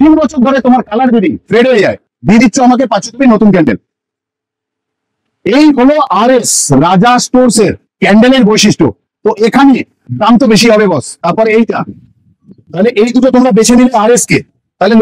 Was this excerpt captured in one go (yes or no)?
no